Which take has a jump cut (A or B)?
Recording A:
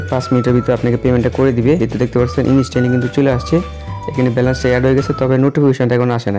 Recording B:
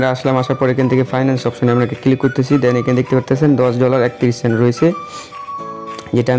A